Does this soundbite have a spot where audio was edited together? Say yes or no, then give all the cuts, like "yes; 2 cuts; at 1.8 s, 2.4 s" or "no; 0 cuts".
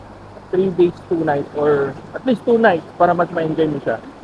no; 0 cuts